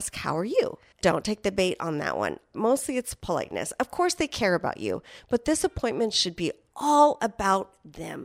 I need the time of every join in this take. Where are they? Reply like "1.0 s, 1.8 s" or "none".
0.9 s, 2.6 s